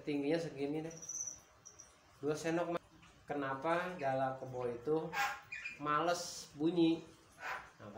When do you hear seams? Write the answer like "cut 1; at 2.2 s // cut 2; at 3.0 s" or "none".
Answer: cut 1; at 2.8 s